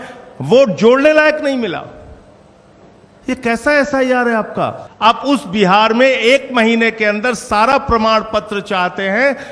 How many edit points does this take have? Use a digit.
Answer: 1